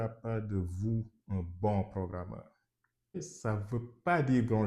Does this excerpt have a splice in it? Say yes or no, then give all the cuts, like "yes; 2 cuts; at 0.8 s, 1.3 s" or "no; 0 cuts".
yes; 1 cut; at 3.2 s